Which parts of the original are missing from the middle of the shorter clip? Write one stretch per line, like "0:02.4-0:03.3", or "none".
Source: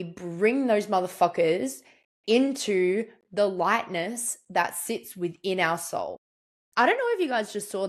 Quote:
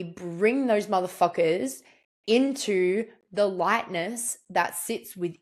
none